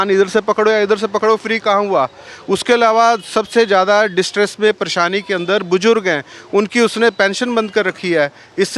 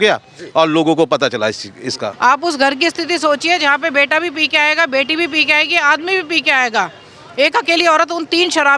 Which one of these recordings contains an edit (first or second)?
second